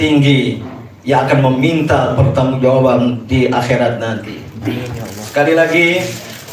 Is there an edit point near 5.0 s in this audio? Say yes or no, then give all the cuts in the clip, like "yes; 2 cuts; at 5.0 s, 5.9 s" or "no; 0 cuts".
no; 0 cuts